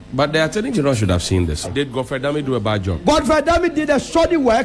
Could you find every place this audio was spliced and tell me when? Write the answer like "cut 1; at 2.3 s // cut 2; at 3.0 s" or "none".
cut 1; at 1.7 s